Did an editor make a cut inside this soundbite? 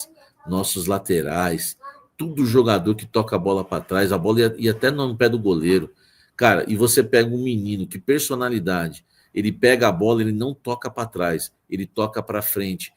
no; 0 cuts

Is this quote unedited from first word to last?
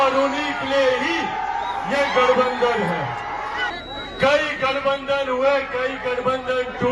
no; 1 cut; at 3.7 s

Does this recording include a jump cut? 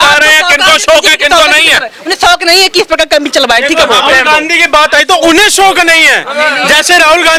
no; 0 cuts

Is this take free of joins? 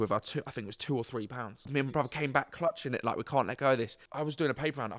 no; 2 cuts; at 1.7 s, 4.0 s

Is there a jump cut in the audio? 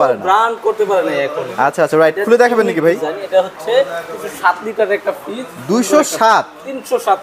no; 0 cuts

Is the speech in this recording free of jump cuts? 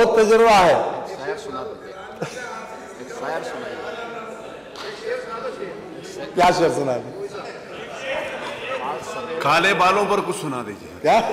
yes; 0 cuts

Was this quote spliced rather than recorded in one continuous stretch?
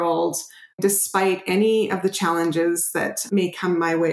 yes; 2 cuts; at 0.8 s, 3.2 s

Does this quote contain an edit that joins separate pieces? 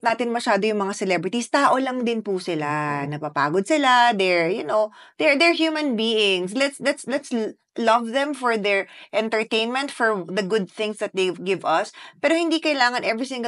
no; 0 cuts

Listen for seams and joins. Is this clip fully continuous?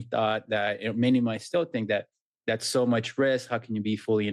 yes; 0 cuts

